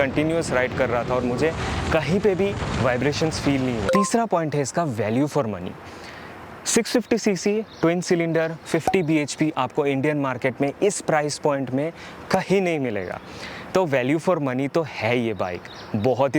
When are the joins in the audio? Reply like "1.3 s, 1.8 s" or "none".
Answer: none